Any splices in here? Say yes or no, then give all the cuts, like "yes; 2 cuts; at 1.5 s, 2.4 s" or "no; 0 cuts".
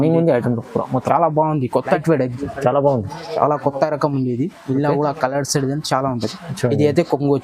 yes; 1 cut; at 2.0 s